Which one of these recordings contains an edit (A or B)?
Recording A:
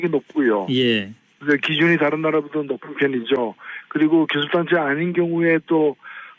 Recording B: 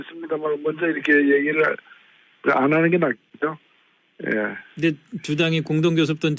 A